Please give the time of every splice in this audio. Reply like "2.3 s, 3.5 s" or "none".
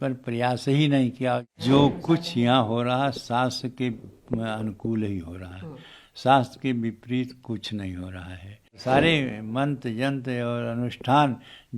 1.5 s, 8.8 s